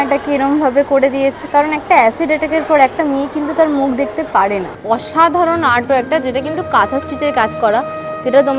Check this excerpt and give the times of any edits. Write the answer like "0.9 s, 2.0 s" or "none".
4.7 s